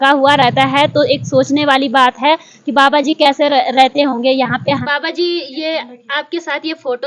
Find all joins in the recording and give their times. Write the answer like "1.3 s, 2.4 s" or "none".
4.8 s